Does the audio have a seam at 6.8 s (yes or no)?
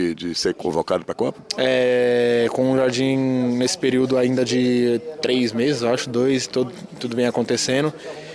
no